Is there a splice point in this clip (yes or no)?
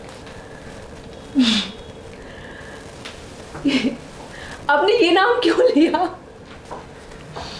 no